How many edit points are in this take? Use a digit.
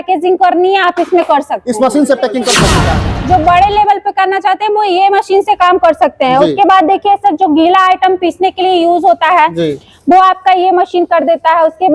1